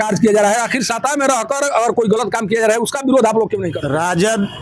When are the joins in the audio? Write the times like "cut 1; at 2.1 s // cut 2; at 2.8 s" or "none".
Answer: cut 1; at 3.7 s